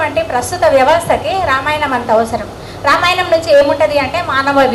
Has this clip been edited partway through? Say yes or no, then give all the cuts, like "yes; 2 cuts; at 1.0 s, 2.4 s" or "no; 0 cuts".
no; 0 cuts